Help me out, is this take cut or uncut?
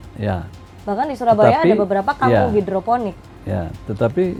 uncut